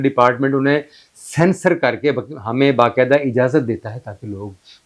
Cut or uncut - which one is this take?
uncut